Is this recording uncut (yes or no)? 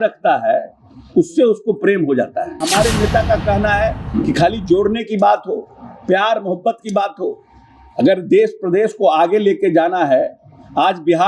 no